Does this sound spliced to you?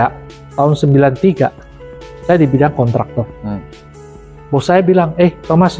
no; 0 cuts

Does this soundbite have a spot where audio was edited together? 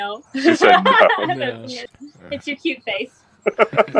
yes; 1 cut; at 1.7 s

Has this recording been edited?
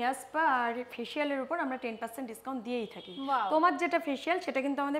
no; 0 cuts

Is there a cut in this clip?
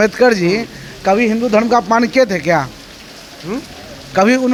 no; 0 cuts

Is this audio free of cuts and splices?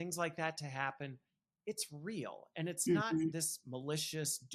yes; 0 cuts

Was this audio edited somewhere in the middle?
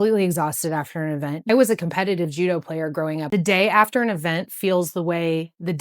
yes; 1 cut; at 3.3 s

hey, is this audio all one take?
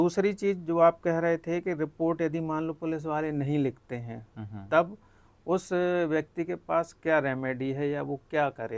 yes; 0 cuts

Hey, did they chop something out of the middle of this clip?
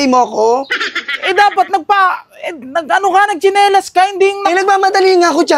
no; 0 cuts

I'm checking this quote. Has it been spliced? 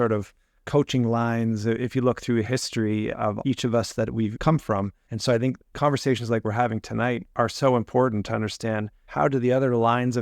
yes; 4 cuts; at 3.2 s, 4.6 s, 5.7 s, 9.0 s

